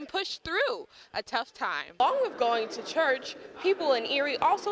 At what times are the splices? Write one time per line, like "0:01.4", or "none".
0:02.0